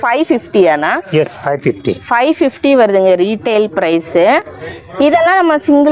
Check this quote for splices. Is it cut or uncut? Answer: uncut